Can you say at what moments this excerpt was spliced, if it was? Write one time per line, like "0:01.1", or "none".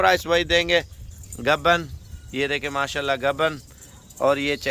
0:01.0